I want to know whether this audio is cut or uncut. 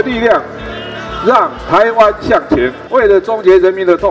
cut